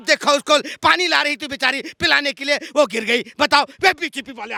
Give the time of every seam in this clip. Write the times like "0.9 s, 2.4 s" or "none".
none